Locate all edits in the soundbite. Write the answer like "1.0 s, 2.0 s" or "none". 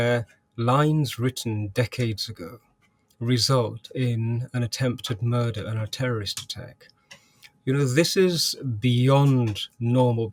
none